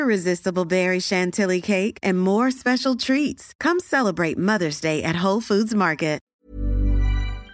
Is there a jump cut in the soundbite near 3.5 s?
no; 1 cut; at 6.3 s

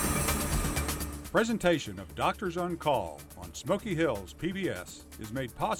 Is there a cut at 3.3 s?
no; 1 cut; at 1.2 s

